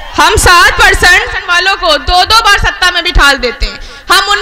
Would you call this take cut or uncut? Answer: cut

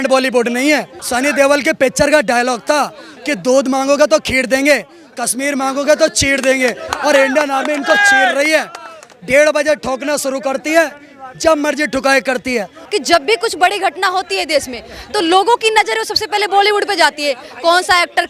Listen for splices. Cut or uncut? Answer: cut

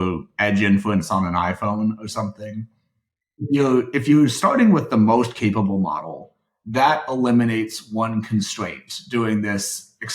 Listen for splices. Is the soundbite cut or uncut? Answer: uncut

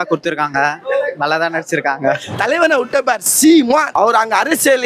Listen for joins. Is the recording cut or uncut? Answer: cut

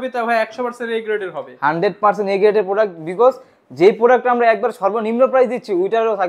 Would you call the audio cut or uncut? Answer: uncut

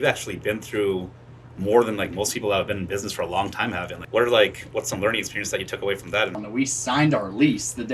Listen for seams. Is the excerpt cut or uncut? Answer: cut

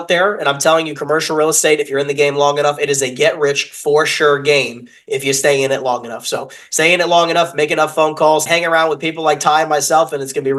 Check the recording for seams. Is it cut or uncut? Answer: uncut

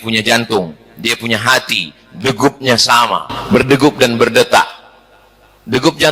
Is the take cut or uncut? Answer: uncut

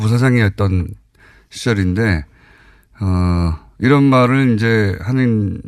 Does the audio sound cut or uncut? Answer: uncut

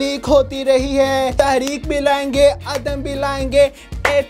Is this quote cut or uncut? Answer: cut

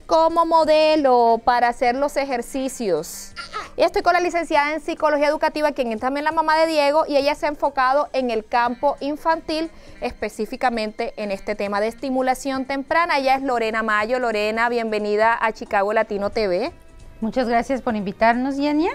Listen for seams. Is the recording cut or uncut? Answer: cut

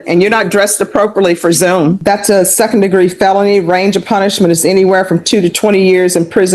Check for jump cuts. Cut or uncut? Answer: cut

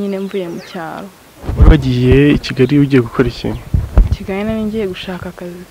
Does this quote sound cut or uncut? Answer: cut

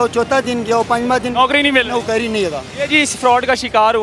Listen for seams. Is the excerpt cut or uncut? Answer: uncut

